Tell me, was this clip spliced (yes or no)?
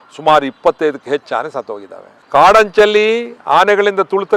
yes